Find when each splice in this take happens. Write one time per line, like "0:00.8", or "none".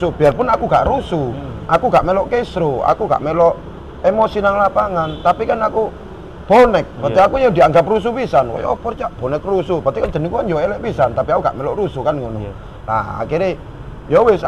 none